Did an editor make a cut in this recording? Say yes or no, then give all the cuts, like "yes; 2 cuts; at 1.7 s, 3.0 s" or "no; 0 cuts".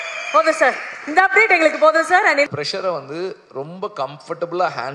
yes; 1 cut; at 2.5 s